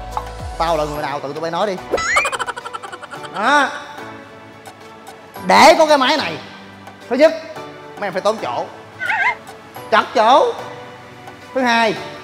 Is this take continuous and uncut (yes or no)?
yes